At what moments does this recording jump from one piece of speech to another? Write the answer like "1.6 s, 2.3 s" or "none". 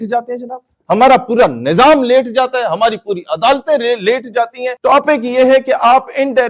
4.6 s